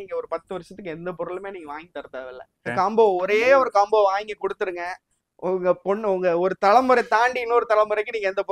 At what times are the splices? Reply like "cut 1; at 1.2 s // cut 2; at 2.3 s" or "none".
cut 1; at 2.6 s